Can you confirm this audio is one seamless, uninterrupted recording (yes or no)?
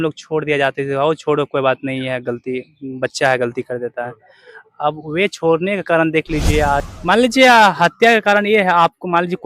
no